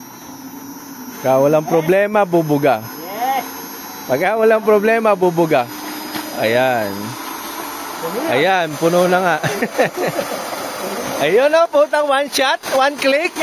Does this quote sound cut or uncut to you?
uncut